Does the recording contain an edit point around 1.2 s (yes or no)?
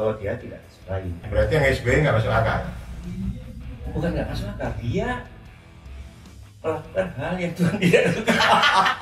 yes